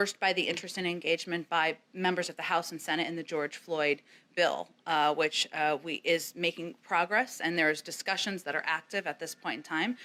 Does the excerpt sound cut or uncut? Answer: uncut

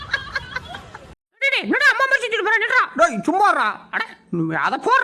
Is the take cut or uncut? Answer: cut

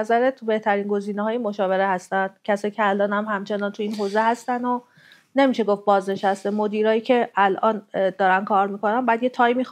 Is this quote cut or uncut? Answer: uncut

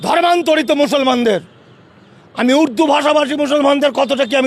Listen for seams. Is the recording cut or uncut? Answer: uncut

